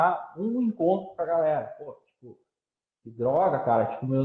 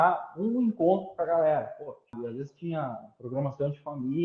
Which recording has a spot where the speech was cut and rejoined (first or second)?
second